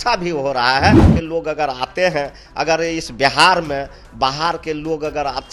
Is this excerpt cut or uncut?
cut